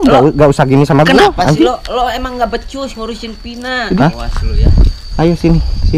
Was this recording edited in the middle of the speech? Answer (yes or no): yes